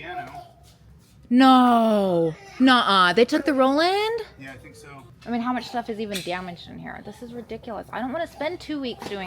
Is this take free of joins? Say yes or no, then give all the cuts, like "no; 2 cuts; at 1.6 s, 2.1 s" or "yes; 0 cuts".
no; 2 cuts; at 2.4 s, 5.2 s